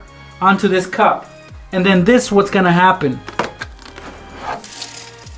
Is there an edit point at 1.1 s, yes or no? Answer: no